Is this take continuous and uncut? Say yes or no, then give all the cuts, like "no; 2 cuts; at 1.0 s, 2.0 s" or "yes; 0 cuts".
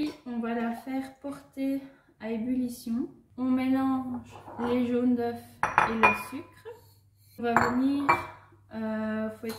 no; 2 cuts; at 3.2 s, 7.4 s